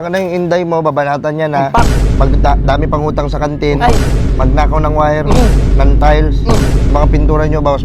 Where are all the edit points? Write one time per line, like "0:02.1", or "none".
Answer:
none